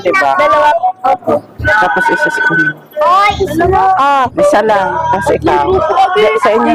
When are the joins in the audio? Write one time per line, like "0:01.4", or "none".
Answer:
none